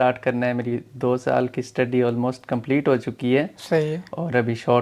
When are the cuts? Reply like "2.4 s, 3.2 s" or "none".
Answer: none